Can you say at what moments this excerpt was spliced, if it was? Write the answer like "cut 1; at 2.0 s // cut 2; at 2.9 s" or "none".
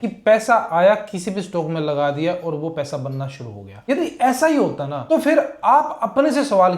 cut 1; at 3.7 s // cut 2; at 4.9 s